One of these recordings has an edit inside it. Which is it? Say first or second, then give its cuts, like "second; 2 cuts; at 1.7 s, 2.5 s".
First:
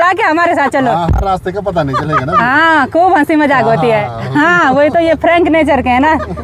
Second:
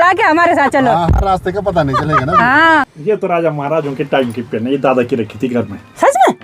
second; 1 cut; at 2.9 s